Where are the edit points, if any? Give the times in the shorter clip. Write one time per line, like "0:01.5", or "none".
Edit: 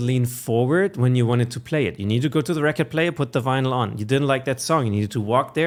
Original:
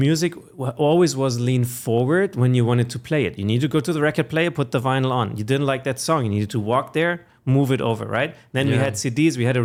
none